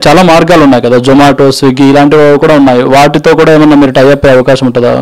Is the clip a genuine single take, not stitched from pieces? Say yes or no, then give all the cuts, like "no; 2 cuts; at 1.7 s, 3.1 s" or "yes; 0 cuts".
yes; 0 cuts